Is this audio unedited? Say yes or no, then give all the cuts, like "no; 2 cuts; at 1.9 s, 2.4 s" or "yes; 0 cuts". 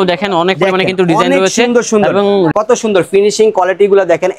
no; 1 cut; at 2.5 s